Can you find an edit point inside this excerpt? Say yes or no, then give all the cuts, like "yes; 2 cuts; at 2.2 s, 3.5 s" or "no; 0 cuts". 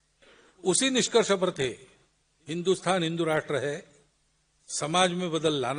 no; 0 cuts